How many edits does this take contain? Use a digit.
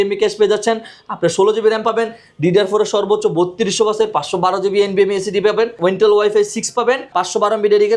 2